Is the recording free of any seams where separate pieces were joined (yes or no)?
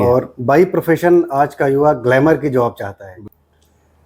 no